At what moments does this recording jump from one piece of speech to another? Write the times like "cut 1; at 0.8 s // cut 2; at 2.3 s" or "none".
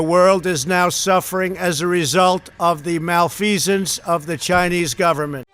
none